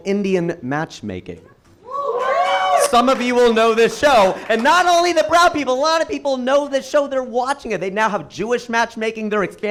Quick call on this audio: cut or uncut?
uncut